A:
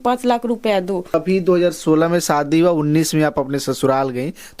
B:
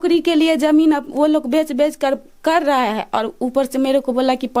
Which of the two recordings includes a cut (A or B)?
A